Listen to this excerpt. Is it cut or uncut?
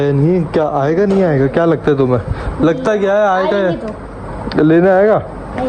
uncut